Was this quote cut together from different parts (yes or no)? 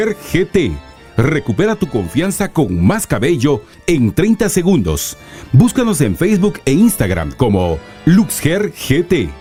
no